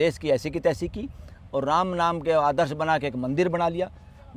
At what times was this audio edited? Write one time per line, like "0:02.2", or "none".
none